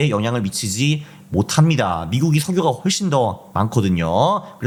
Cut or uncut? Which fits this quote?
uncut